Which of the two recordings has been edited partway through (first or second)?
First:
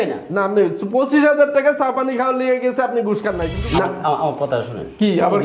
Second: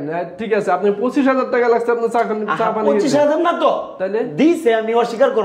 first